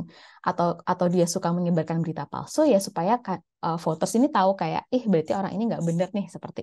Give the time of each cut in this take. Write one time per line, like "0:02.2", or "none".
none